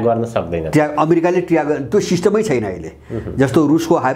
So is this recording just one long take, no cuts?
yes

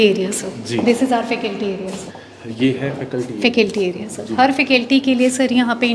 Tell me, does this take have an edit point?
yes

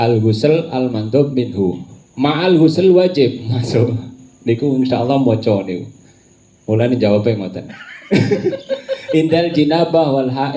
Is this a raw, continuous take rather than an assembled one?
yes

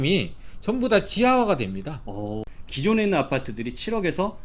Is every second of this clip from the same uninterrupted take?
no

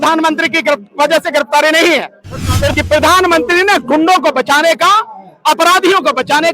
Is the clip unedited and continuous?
no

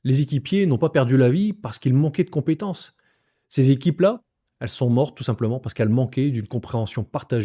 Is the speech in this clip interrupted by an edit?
no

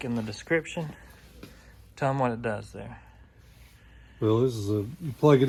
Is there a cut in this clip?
no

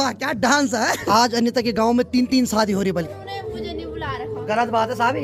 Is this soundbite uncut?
no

